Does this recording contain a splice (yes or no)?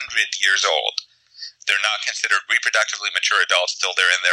no